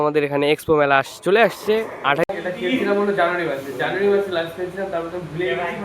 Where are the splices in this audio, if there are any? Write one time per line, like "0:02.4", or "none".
0:02.3